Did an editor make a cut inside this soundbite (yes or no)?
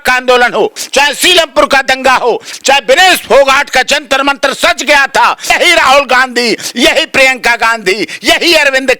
yes